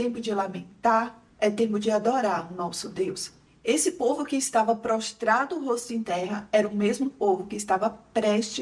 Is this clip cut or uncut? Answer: uncut